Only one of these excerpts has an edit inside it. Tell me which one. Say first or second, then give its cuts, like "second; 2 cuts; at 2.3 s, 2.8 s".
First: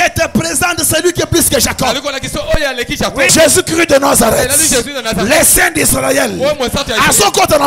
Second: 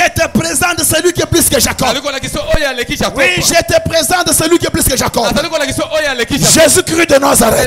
first; 1 cut; at 3.3 s